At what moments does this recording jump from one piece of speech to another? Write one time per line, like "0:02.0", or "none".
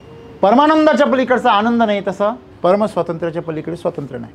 0:02.5